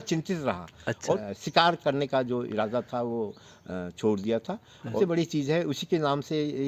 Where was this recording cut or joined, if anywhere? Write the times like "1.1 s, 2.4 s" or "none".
1.1 s, 4.9 s